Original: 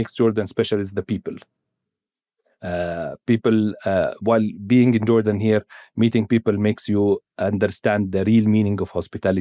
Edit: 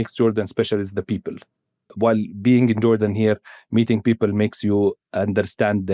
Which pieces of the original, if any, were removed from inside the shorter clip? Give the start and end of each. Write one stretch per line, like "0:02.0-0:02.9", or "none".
0:01.9-0:04.2